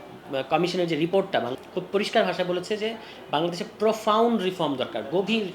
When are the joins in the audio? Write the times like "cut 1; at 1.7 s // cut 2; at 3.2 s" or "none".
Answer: cut 1; at 1.5 s